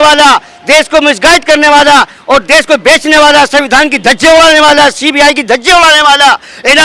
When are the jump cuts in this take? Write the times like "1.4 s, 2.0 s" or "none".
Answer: none